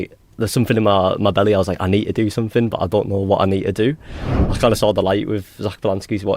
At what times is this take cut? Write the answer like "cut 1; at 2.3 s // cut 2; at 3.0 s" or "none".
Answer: cut 1; at 4.4 s

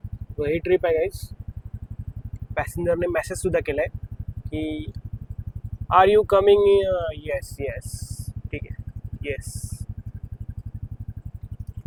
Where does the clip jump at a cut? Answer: none

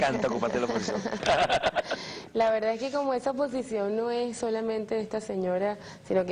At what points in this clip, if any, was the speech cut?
cut 1; at 5.2 s

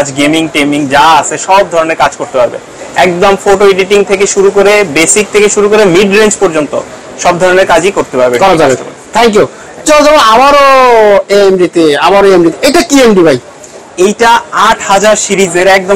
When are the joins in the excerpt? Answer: none

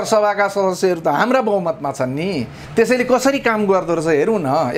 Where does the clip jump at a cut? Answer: cut 1; at 2.6 s

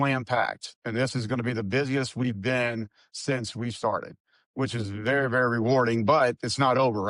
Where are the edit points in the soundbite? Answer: none

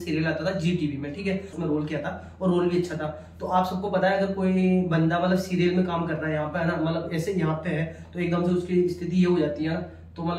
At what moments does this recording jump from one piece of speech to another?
cut 1; at 1.5 s

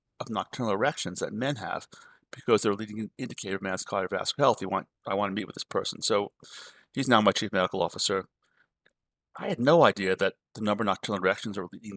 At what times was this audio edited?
cut 1; at 9.4 s

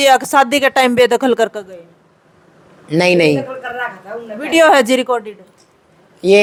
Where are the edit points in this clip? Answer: none

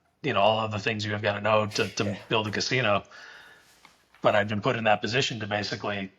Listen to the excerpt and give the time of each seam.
none

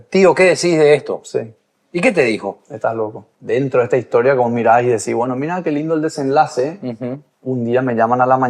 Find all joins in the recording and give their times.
cut 1; at 3.3 s

